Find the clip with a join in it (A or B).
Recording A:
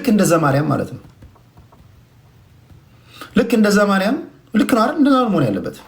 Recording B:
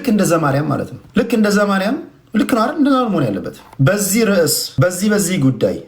B